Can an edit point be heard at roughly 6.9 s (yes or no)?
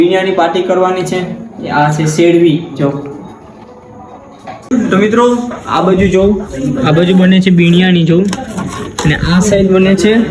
no